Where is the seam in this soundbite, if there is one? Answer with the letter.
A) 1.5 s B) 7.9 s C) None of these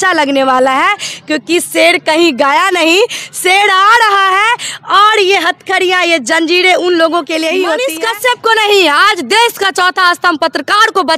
B